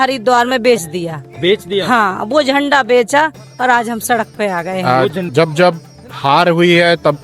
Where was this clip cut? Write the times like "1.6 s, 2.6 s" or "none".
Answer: 4.8 s